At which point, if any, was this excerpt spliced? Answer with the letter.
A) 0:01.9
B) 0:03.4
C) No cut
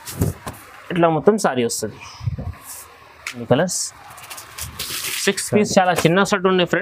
B